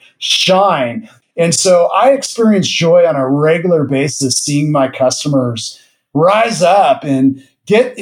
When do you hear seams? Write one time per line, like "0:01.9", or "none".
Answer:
0:01.1